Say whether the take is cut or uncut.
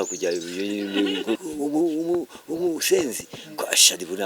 cut